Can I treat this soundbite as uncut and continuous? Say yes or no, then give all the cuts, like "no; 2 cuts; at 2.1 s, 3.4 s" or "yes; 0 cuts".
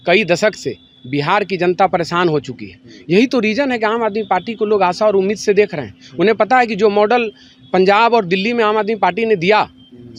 yes; 0 cuts